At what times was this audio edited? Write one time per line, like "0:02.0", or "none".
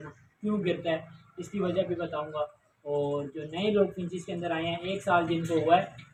none